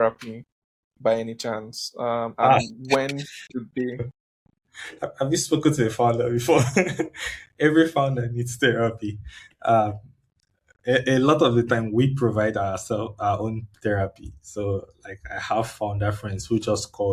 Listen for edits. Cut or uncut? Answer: uncut